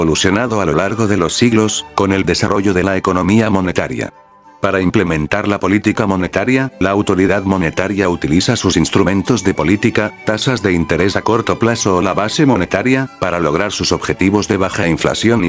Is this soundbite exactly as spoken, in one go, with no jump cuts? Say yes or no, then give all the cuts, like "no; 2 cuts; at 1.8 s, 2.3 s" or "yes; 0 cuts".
no; 3 cuts; at 2.0 s, 4.4 s, 14.6 s